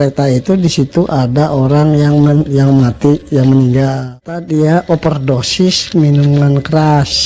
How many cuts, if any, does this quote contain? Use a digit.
1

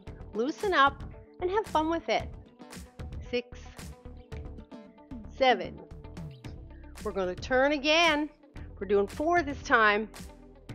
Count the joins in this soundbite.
0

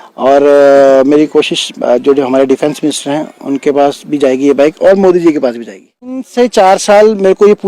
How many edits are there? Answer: 1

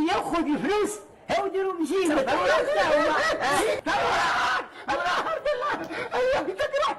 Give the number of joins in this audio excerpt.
1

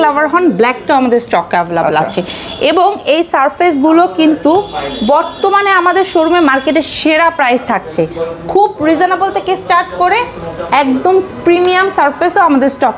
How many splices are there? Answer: 0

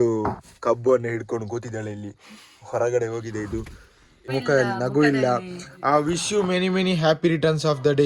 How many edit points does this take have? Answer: 1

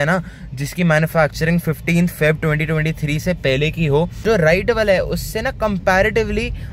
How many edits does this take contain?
1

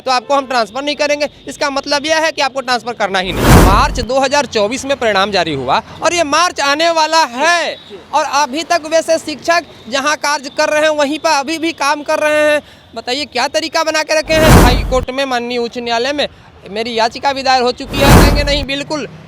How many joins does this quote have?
3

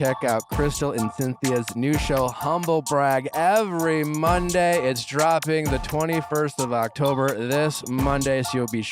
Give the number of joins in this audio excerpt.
0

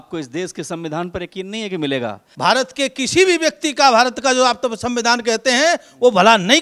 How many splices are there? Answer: 1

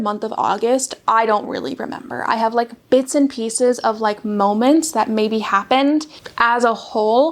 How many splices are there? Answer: 1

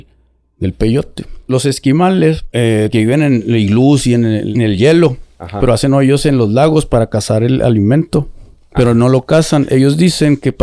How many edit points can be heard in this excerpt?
3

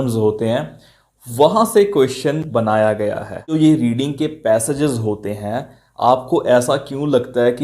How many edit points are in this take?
1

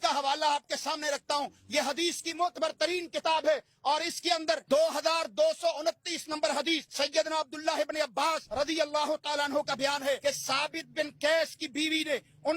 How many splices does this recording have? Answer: 4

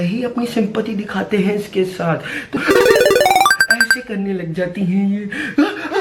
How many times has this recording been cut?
1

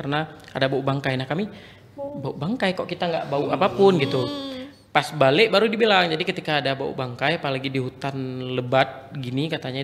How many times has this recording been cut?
0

